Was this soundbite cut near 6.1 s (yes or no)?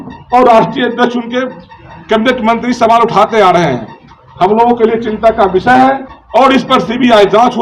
yes